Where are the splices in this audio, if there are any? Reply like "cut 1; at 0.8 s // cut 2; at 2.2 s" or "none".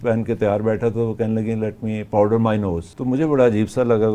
cut 1; at 2.9 s